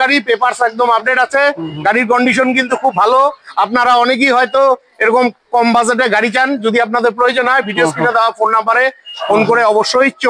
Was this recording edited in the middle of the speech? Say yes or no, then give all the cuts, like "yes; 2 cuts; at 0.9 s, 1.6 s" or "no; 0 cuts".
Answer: no; 0 cuts